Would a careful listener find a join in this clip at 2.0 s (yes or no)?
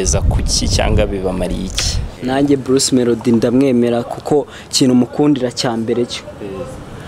yes